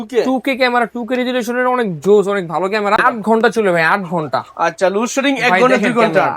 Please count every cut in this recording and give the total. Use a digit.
1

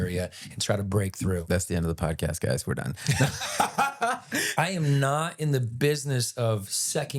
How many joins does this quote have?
2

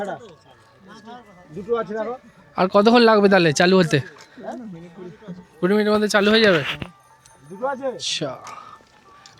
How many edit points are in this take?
0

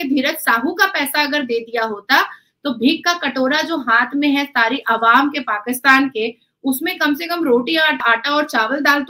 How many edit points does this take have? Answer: 1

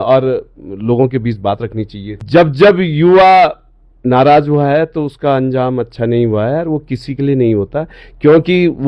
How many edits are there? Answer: 1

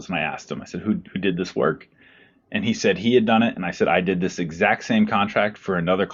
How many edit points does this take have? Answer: 0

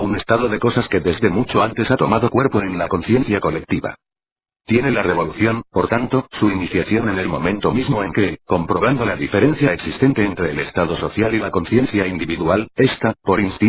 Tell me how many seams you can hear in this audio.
1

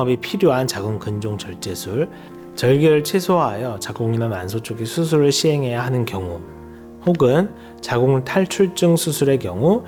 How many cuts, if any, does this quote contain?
0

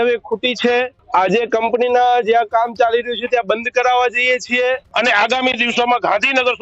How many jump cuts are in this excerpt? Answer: 2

